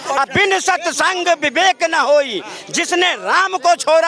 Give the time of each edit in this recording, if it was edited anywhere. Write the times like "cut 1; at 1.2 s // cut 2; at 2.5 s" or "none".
none